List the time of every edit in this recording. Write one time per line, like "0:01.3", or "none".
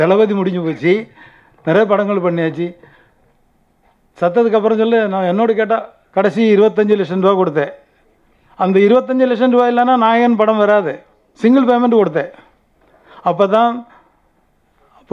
0:06.0